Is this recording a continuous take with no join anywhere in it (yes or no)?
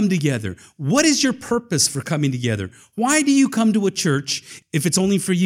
no